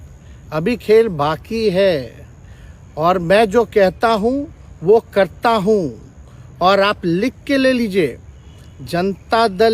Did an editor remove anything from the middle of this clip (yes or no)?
no